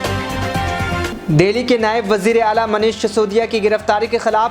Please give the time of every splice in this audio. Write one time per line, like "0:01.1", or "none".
0:01.0